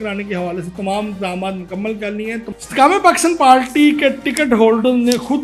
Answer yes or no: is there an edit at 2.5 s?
yes